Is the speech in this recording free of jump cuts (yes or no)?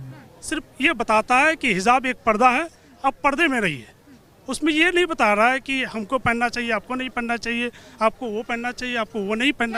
yes